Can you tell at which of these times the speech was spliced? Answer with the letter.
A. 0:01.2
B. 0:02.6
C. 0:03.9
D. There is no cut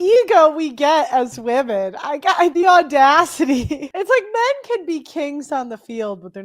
C